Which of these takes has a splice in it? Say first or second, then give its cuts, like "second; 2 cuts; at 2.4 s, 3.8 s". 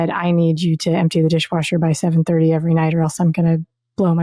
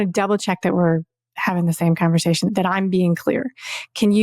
second; 1 cut; at 2.5 s